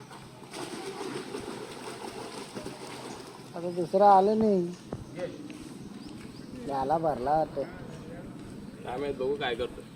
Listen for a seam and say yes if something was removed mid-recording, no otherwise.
no